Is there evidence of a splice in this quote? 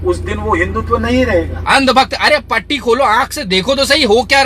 yes; 1 cut; at 1.6 s

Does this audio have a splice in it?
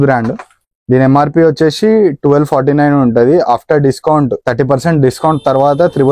no; 0 cuts

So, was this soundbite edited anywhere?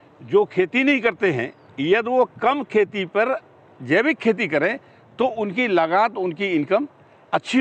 no; 0 cuts

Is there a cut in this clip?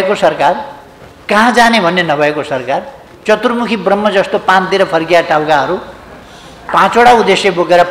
no; 0 cuts

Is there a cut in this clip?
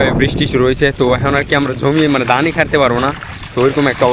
no; 0 cuts

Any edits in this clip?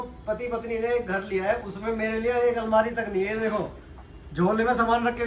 no; 0 cuts

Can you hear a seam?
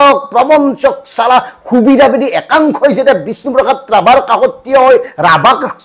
no; 0 cuts

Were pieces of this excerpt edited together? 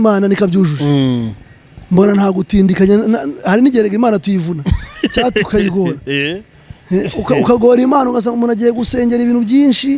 no; 0 cuts

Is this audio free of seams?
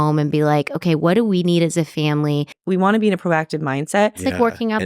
no; 1 cut; at 2.6 s

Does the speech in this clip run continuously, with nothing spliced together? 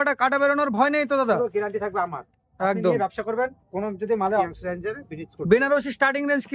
no; 1 cut; at 4.5 s

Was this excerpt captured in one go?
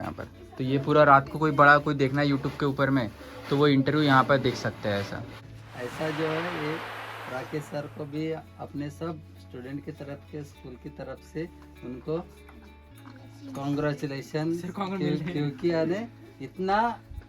no; 1 cut; at 5.4 s

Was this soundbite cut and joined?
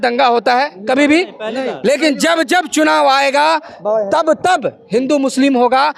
no; 0 cuts

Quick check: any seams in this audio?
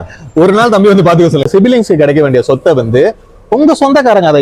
yes; 1 cut; at 1.5 s

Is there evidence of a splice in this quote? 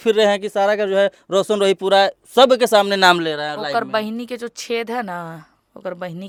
no; 0 cuts

